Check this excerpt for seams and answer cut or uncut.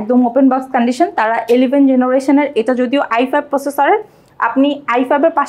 uncut